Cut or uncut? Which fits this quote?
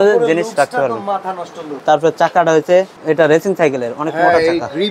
cut